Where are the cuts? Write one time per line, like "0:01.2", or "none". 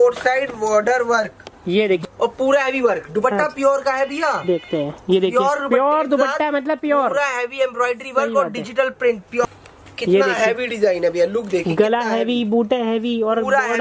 0:02.0
0:09.4